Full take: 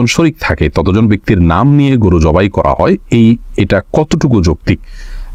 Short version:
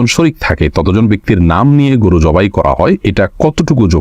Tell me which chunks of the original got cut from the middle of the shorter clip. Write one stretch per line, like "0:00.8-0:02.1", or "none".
0:03.0-0:03.6

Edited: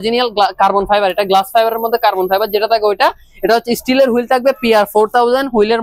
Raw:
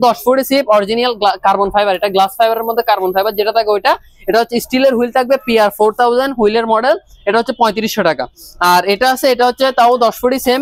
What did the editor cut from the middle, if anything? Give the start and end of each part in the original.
none

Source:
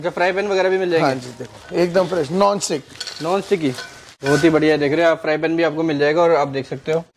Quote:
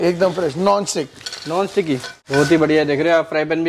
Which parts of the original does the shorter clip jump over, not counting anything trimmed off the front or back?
0:03.9-0:04.1

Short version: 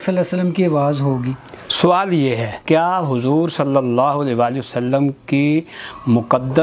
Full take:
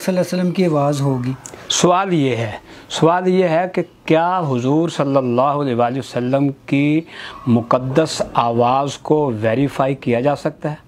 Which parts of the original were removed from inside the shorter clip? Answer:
0:02.5-0:03.9

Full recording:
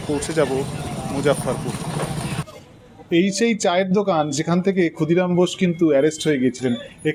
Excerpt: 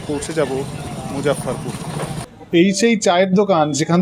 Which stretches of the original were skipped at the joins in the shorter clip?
0:02.3-0:02.9

